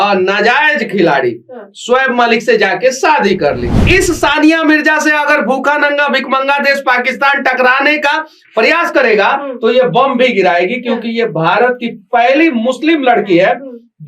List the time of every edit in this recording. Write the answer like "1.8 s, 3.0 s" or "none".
3.8 s